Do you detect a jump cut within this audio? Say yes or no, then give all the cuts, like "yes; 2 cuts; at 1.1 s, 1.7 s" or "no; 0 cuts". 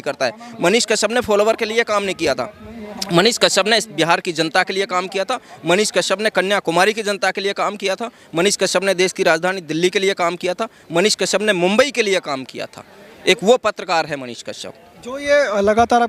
no; 0 cuts